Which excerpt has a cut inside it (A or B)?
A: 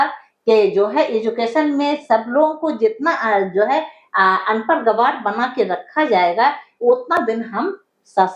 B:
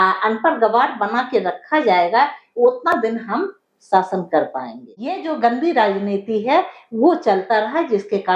B